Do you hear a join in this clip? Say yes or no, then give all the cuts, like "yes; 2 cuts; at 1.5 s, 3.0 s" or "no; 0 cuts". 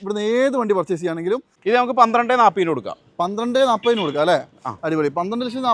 yes; 1 cut; at 1.5 s